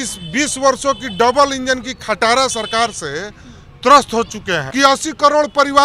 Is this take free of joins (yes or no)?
no